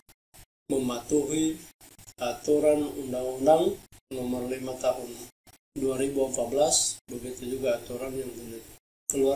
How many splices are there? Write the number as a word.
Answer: zero